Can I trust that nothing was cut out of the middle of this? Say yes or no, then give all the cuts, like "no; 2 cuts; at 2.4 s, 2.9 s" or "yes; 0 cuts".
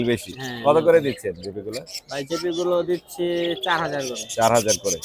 yes; 0 cuts